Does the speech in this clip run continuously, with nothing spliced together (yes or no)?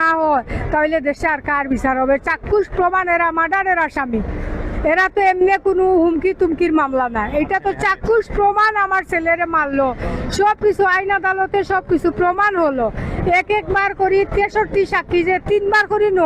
yes